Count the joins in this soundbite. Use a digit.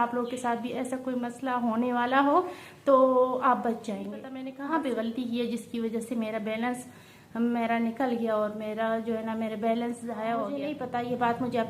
2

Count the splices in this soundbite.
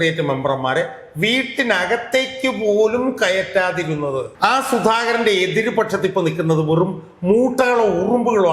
1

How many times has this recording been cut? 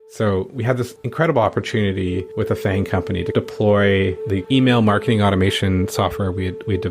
2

